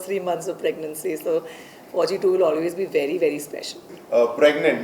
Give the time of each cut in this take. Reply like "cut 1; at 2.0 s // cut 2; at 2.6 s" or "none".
cut 1; at 3.9 s